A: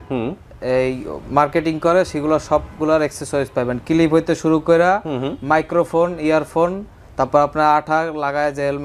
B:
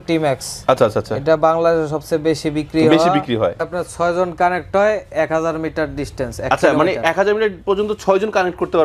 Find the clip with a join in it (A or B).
B